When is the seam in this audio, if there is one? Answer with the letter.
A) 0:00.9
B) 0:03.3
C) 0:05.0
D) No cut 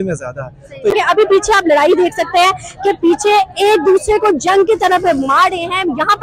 A